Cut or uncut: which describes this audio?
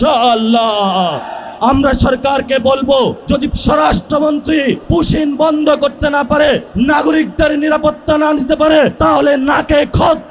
cut